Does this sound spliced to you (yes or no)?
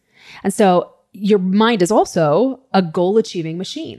no